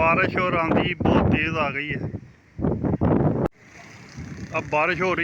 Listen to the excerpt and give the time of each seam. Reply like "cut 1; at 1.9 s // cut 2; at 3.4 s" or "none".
cut 1; at 3.5 s